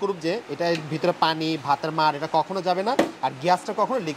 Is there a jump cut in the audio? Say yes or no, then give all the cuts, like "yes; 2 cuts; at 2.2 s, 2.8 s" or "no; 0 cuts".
no; 0 cuts